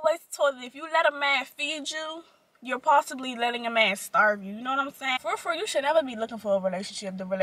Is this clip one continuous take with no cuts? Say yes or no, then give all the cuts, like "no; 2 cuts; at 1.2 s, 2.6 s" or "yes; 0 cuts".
no; 1 cut; at 5.2 s